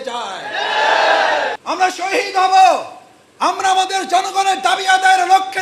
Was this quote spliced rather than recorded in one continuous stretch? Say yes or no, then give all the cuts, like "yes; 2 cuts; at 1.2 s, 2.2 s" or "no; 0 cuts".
yes; 1 cut; at 1.6 s